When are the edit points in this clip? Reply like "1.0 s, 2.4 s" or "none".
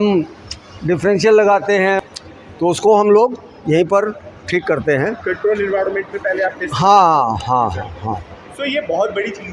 2.0 s